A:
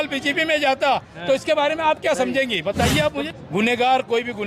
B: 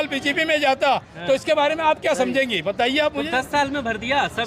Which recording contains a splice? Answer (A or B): A